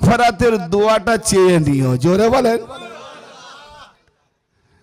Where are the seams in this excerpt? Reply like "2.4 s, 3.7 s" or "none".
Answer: none